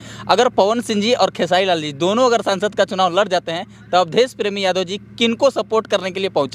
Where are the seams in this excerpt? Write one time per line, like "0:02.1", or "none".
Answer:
none

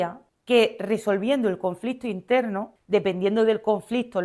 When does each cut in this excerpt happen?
0:02.7

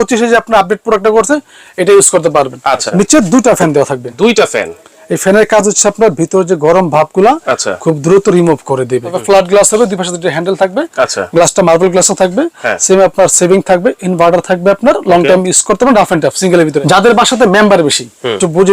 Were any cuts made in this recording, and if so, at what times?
0:02.8
0:09.2
0:16.8

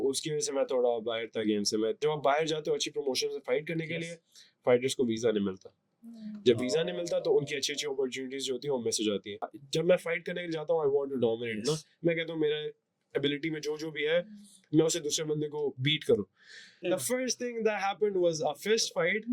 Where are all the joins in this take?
0:02.0
0:09.6
0:16.8

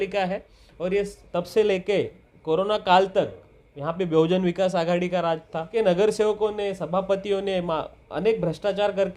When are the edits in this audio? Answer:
0:01.2
0:05.7

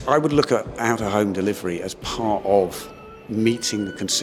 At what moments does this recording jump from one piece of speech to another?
none

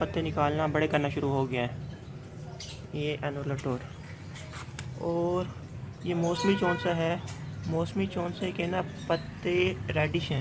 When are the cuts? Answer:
none

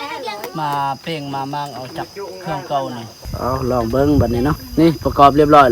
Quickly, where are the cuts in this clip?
0:03.3
0:04.6

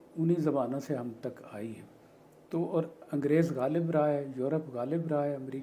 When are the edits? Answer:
none

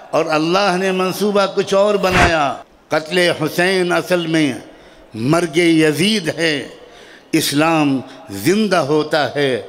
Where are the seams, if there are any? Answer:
0:02.7

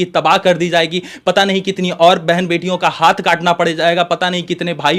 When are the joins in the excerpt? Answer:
none

